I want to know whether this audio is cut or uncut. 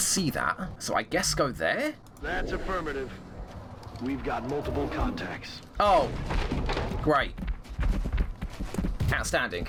uncut